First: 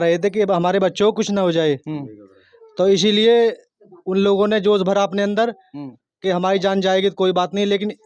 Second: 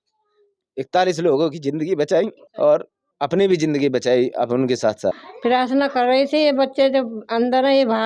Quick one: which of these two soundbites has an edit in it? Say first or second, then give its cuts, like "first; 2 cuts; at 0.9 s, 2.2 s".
second; 3 cuts; at 2.4 s, 3.0 s, 5.3 s